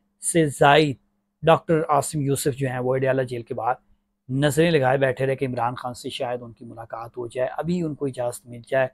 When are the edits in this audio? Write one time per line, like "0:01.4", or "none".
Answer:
none